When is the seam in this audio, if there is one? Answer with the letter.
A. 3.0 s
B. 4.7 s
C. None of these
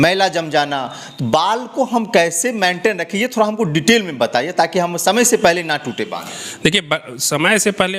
C